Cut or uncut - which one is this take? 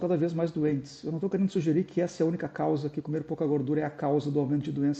uncut